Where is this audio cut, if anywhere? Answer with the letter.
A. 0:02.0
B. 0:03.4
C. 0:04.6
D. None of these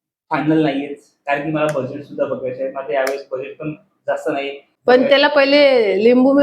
C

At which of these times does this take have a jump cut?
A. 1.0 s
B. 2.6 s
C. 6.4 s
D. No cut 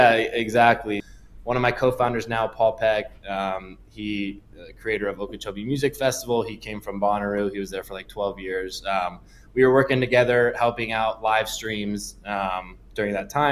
A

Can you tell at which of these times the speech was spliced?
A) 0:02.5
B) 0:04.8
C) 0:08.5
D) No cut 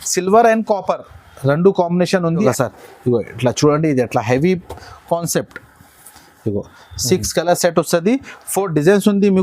A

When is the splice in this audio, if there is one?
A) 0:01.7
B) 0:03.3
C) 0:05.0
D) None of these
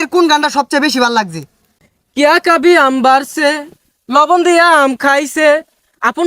A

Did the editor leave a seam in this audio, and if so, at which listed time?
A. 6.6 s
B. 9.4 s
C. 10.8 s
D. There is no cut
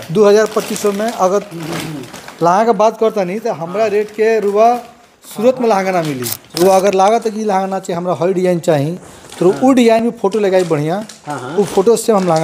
A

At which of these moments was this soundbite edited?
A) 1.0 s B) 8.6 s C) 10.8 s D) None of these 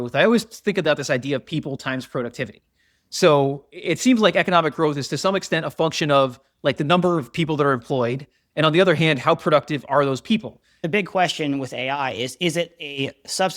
C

